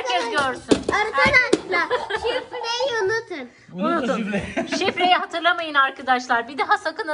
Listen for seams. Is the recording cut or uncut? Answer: uncut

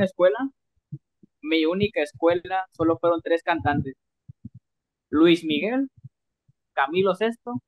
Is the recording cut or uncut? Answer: uncut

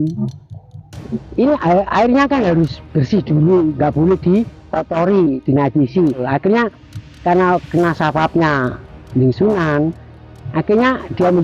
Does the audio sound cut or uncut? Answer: cut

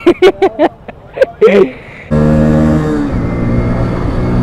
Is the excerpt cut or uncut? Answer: cut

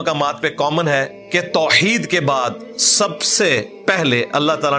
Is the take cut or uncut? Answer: cut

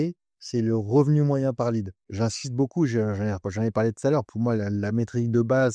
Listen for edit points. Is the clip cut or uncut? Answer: cut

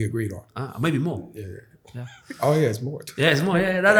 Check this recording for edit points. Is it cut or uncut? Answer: uncut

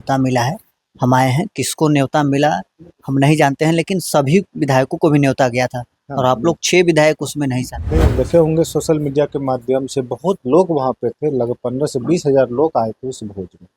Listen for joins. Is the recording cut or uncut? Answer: cut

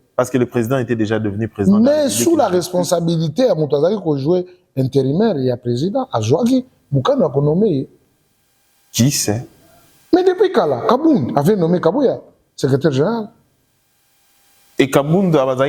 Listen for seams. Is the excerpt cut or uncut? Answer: uncut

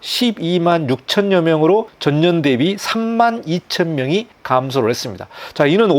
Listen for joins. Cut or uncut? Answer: cut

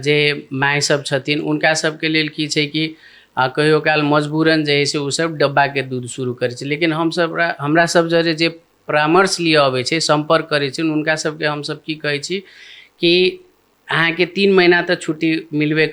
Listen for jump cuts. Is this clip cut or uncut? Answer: uncut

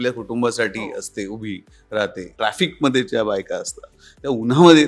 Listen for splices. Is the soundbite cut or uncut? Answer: cut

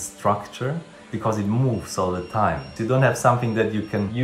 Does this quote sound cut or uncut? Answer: cut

